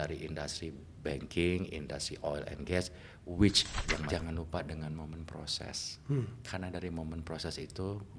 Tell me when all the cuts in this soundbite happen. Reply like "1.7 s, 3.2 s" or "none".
4.1 s